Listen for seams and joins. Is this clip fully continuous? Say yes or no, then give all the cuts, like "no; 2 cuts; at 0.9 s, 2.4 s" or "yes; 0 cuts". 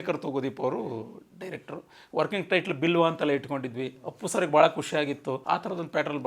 no; 1 cut; at 5.3 s